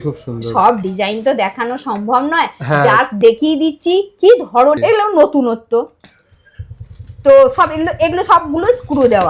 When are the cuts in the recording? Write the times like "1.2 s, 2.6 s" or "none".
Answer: 4.8 s